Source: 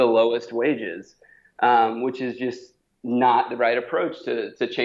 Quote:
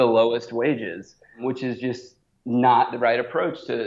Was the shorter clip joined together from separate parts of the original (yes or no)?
yes